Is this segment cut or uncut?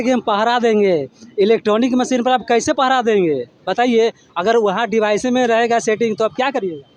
uncut